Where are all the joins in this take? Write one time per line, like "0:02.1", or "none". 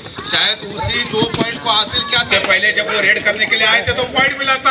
0:02.3